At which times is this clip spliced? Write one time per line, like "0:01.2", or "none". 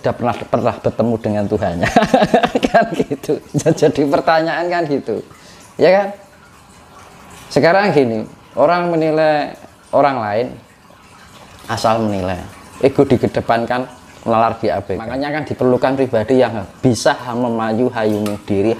0:15.4